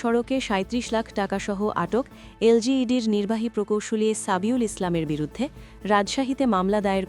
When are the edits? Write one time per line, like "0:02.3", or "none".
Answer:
none

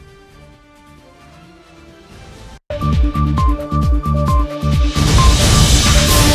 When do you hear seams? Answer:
0:02.6

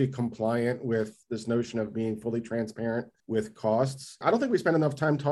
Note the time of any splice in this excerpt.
0:01.2
0:03.2
0:04.2

